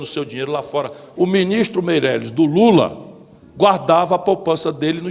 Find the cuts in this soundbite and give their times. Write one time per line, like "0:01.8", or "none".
0:01.0

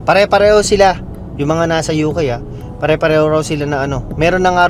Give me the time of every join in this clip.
none

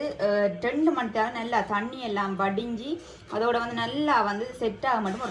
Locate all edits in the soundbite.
none

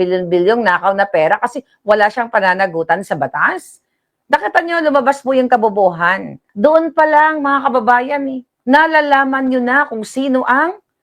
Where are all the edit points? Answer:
0:06.4
0:08.5

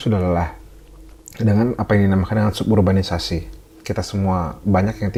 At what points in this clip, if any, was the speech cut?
none

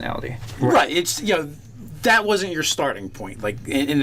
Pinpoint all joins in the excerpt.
0:02.1

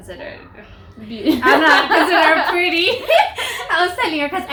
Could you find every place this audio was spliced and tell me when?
none

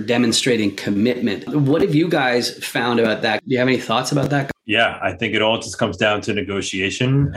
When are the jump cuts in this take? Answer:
0:01.5
0:03.4
0:04.5

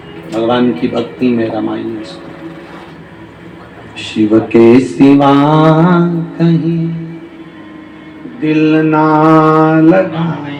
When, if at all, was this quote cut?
none

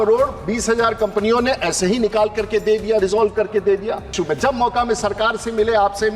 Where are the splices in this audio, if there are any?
0:04.1

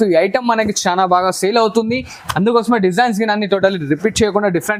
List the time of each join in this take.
none

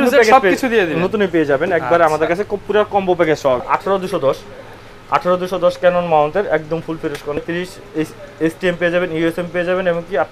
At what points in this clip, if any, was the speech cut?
0:03.6
0:07.4

